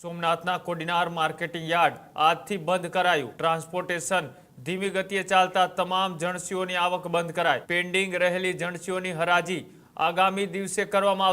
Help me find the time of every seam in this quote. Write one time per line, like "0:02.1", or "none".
0:03.3
0:07.6